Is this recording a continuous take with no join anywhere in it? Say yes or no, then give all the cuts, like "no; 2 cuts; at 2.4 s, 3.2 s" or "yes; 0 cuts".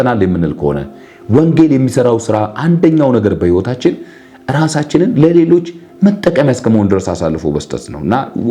yes; 0 cuts